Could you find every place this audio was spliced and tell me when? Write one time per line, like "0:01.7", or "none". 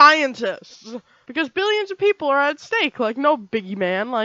0:01.2